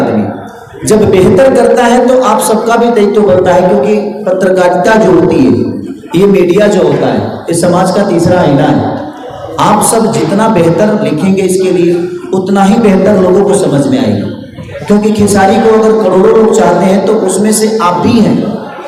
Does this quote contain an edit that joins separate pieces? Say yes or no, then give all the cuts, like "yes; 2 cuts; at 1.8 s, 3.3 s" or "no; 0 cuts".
no; 0 cuts